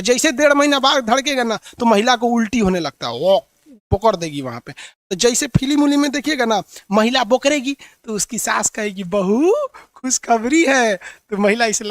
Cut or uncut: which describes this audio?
uncut